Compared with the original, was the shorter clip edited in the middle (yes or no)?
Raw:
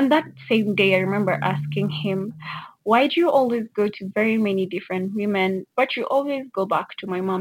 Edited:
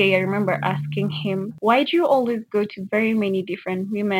yes